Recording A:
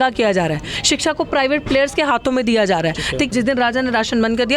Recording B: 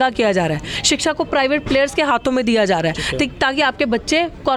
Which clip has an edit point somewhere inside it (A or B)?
A